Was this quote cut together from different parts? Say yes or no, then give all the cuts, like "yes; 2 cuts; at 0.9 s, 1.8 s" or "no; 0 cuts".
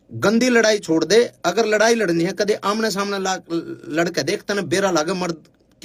no; 0 cuts